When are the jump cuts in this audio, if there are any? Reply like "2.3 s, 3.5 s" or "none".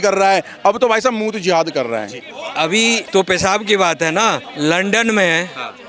2.6 s, 4.5 s